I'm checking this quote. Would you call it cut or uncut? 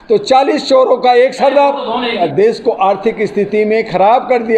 cut